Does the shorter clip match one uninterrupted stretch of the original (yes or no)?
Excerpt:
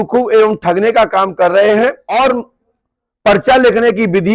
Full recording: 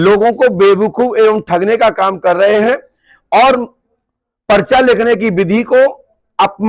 no